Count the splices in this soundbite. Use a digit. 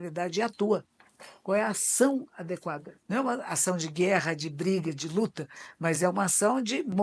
1